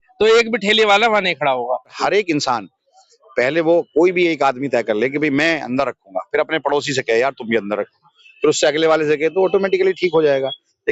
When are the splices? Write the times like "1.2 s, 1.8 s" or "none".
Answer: 1.9 s